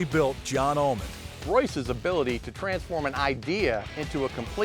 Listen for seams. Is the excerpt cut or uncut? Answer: cut